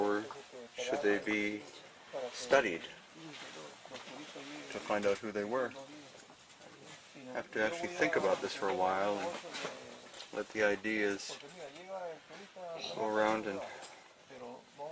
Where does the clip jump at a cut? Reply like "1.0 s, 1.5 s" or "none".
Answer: 13.6 s